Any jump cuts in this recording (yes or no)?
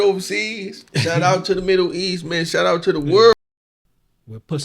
yes